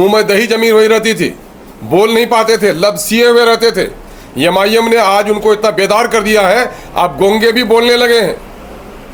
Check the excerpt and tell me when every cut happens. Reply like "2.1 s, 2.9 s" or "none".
none